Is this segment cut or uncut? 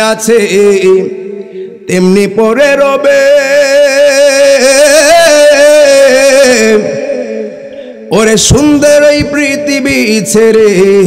uncut